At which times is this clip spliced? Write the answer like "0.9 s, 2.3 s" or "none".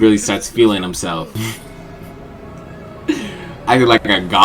none